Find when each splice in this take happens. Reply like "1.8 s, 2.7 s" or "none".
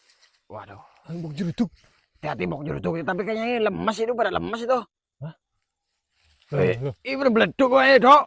none